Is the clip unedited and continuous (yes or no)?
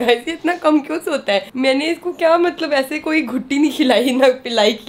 yes